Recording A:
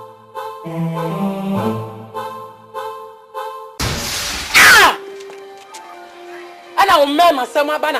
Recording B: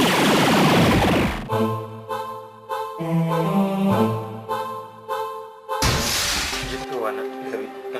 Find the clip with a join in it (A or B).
B